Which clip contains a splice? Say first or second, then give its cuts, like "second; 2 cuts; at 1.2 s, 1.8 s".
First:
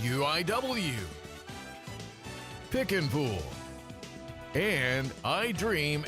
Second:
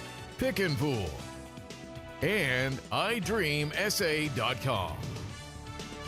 first; 1 cut; at 1.0 s